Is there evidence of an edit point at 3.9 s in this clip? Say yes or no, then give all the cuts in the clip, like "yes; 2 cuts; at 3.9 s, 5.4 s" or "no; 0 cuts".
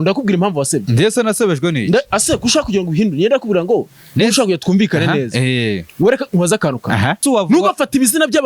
no; 1 cut; at 7.2 s